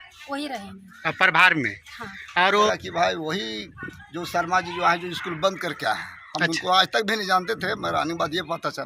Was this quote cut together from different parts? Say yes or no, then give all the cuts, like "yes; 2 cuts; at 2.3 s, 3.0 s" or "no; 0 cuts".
yes; 1 cut; at 2.7 s